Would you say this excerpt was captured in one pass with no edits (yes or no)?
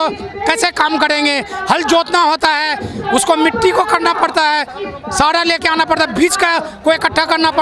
yes